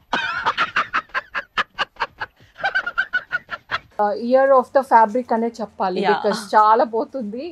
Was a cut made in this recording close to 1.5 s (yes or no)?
no